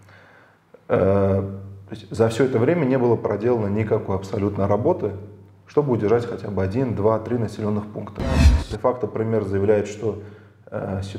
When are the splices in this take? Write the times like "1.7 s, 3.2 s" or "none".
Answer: 8.5 s